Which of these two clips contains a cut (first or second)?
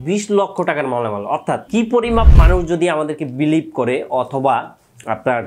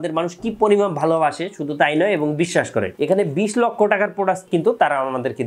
second